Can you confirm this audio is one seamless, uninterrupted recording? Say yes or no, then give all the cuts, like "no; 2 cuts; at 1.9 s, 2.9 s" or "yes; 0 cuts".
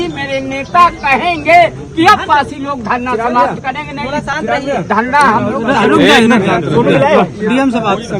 yes; 0 cuts